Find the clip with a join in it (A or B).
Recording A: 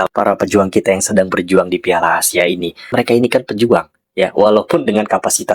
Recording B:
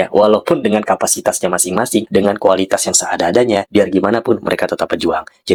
A